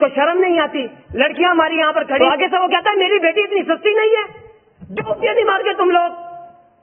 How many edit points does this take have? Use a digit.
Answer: 1